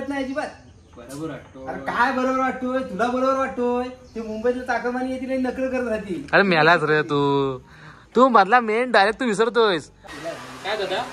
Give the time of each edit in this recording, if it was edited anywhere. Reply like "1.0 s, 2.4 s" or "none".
10.0 s